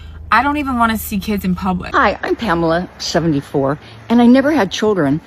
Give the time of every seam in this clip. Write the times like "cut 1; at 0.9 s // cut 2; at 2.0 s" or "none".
cut 1; at 1.9 s